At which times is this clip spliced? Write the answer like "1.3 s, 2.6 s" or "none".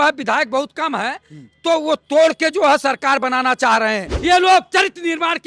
4.1 s